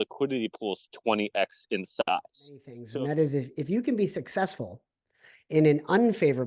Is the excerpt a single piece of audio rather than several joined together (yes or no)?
no